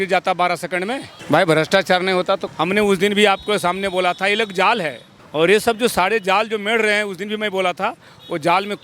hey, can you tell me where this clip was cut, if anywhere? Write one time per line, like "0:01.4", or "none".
none